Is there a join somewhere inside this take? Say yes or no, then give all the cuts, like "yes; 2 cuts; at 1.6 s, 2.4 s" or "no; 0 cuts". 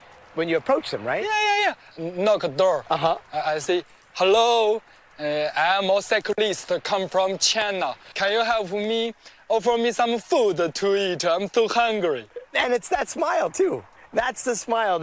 no; 0 cuts